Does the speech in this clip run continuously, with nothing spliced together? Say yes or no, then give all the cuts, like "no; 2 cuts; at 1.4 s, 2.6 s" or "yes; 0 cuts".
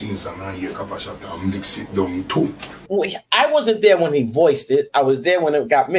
no; 1 cut; at 2.7 s